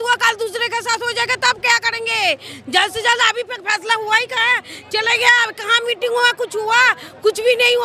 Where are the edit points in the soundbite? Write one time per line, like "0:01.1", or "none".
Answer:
none